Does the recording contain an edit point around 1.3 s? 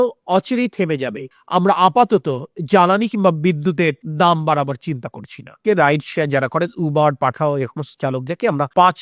yes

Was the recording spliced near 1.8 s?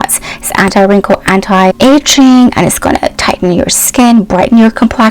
yes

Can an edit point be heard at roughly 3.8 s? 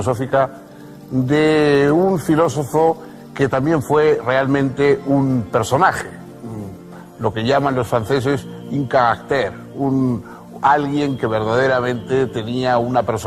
no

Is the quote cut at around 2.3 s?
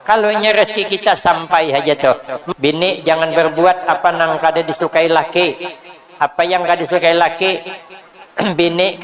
yes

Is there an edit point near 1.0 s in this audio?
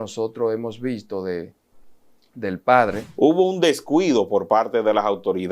no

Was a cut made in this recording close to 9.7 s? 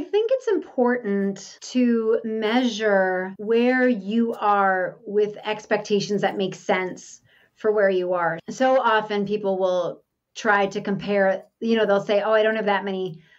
no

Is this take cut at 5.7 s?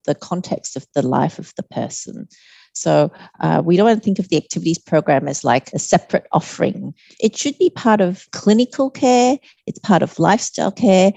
yes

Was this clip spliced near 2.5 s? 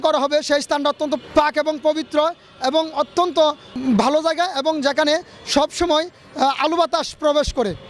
no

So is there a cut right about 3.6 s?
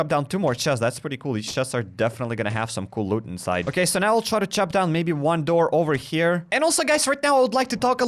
yes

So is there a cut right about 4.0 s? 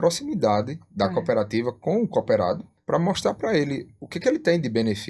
no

